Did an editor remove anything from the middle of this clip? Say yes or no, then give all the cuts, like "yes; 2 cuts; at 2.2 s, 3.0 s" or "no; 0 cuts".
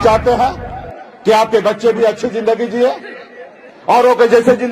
no; 0 cuts